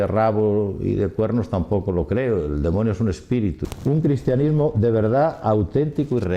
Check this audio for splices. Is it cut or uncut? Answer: cut